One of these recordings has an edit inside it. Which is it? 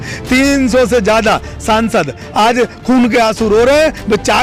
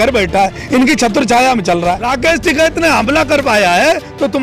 second; 1 cut; at 2.1 s

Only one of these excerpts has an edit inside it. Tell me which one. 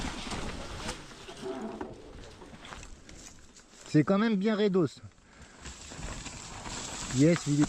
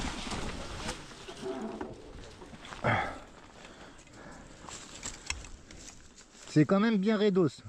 first; 1 cut; at 2.8 s

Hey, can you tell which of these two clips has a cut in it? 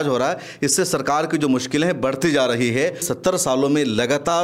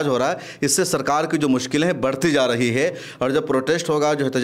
first; 1 cut; at 3.1 s

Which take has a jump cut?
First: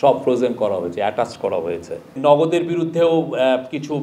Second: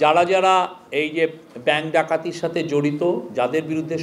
first; 1 cut; at 2.1 s

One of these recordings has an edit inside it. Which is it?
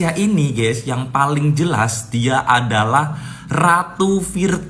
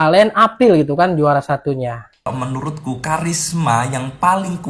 second; 1 cut; at 2.3 s

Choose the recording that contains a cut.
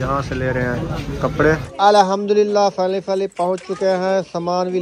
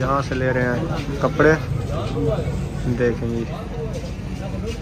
first; 1 cut; at 1.7 s

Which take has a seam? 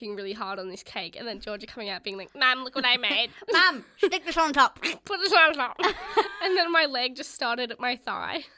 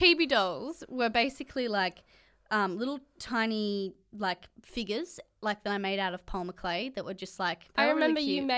second; 1 cut; at 7.6 s

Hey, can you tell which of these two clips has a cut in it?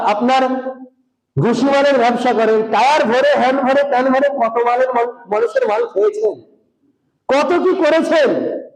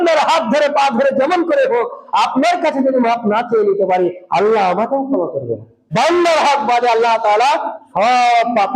second; 1 cut; at 5.9 s

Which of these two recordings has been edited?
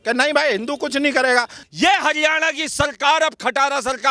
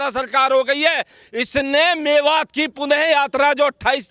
first; 1 cut; at 1.6 s

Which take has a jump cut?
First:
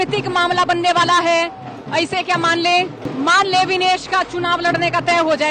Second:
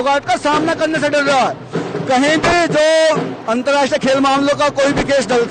first; 1 cut; at 3.1 s

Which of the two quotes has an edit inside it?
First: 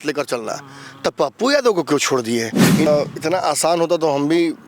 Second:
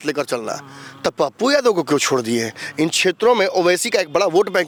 first; 1 cut; at 2.9 s

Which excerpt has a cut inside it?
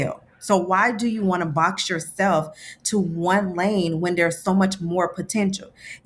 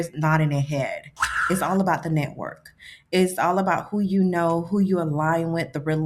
second; 1 cut; at 1.4 s

